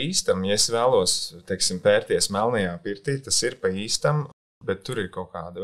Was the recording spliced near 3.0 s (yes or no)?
no